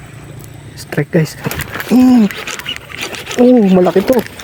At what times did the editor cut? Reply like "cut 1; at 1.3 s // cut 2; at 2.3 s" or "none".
none